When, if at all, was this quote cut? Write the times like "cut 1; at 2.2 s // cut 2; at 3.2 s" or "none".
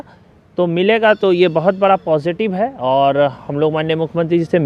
none